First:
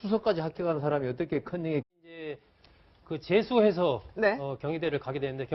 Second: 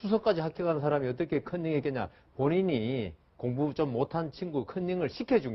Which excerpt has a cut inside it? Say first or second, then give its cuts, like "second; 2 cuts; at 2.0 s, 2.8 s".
second; 1 cut; at 1.8 s